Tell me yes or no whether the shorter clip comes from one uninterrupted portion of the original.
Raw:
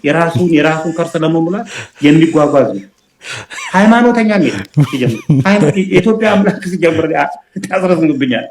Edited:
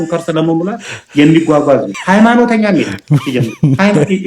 no